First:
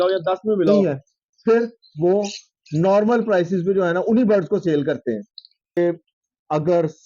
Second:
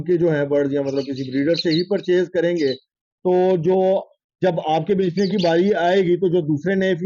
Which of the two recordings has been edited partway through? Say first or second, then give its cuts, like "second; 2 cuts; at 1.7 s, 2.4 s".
first; 2 cuts; at 0.7 s, 5.8 s